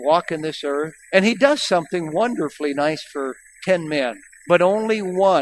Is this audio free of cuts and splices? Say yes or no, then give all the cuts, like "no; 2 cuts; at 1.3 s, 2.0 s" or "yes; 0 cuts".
no; 2 cuts; at 1.0 s, 4.3 s